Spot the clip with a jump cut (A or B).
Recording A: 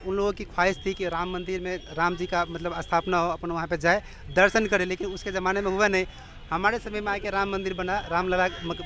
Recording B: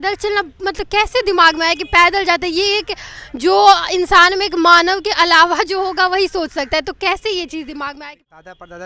B